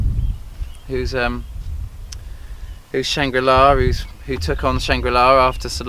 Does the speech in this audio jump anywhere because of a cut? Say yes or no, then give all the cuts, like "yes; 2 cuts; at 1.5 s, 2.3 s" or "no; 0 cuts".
yes; 1 cut; at 1.8 s